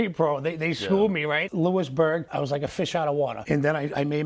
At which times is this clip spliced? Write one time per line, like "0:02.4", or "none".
0:01.4
0:02.3
0:03.4